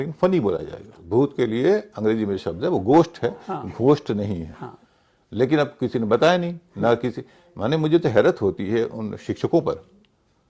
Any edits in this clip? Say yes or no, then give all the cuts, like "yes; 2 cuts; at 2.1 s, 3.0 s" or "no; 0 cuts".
yes; 1 cut; at 1.0 s